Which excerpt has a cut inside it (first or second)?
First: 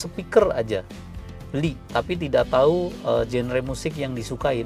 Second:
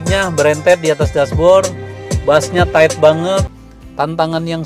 second